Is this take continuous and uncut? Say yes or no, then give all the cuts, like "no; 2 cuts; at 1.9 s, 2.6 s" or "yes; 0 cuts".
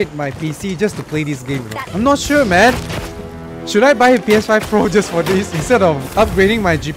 no; 2 cuts; at 1.8 s, 6.0 s